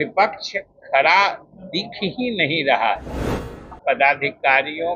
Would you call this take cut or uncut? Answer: cut